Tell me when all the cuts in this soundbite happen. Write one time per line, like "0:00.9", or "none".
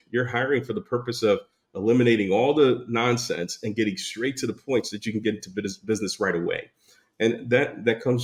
none